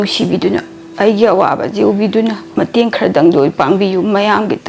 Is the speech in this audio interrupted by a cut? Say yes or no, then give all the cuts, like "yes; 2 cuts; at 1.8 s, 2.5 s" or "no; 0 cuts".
yes; 1 cut; at 2.4 s